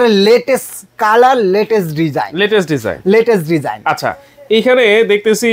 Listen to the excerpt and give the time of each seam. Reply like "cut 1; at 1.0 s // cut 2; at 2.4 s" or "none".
none